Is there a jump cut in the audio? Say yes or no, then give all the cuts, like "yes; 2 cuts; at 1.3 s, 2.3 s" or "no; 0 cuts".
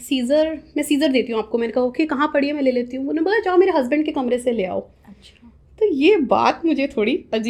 no; 0 cuts